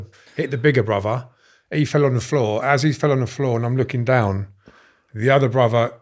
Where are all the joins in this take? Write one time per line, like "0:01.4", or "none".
none